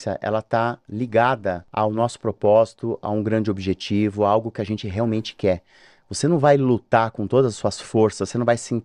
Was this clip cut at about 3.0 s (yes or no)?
no